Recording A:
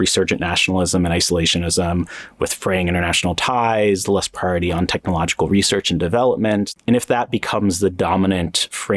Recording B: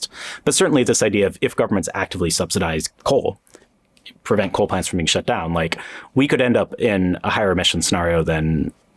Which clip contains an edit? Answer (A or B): A